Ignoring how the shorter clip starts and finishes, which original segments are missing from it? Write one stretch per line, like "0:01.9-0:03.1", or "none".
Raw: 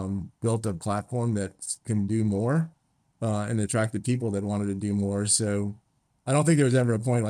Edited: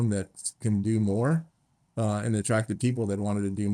none